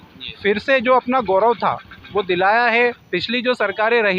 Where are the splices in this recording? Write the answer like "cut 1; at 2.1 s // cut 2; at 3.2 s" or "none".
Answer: cut 1; at 3.1 s

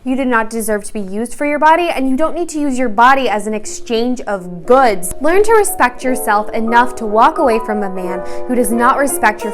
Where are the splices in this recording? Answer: cut 1; at 5.1 s

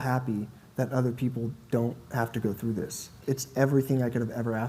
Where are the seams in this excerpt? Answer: cut 1; at 3.1 s

